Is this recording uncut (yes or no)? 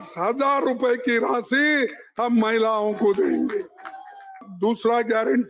no